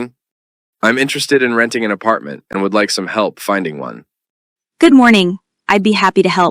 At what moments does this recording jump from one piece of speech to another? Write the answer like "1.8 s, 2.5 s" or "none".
2.0 s